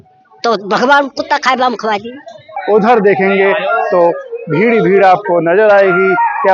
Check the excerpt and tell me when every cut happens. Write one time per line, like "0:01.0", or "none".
0:02.5